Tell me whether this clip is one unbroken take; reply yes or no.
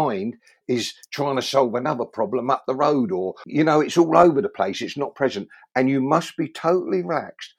no